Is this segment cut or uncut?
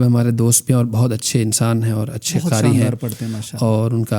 uncut